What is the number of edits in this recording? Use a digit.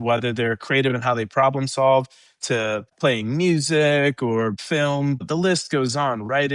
2